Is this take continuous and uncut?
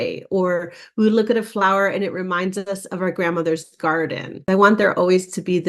no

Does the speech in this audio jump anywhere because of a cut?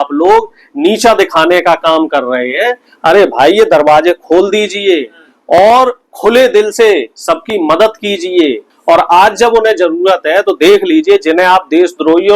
yes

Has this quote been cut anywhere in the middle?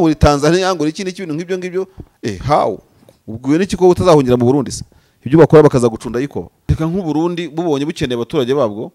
yes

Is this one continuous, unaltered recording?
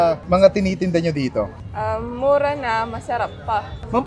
yes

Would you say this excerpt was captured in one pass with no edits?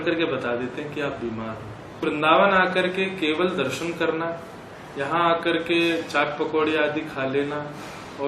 no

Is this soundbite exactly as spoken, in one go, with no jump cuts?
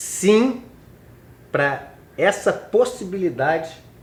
yes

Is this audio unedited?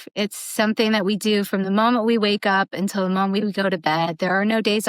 yes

